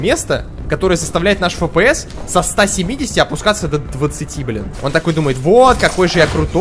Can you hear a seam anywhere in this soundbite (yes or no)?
yes